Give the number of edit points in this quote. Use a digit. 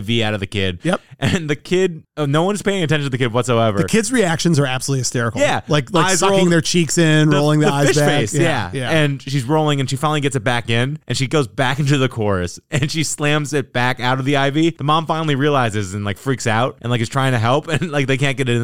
0